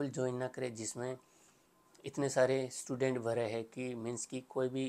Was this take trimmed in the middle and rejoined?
no; 0 cuts

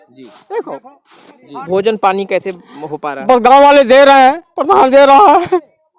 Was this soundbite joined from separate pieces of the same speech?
yes; 1 cut; at 1.6 s

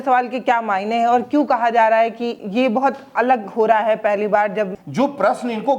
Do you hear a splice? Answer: yes; 2 cuts; at 2.4 s, 4.8 s

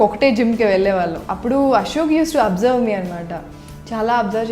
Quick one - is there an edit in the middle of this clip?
yes; 1 cut; at 1.2 s

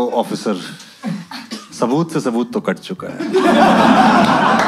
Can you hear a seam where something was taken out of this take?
no; 0 cuts

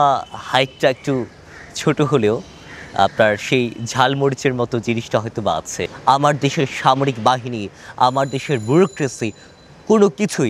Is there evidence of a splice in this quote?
yes; 1 cut; at 5.9 s

